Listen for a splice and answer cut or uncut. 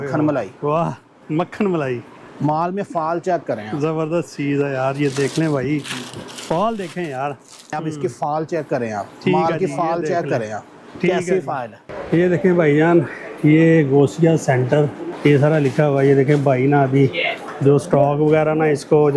cut